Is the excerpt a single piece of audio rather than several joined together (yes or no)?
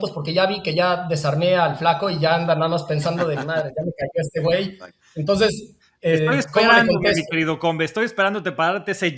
yes